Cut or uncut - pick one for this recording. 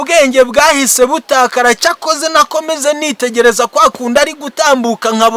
uncut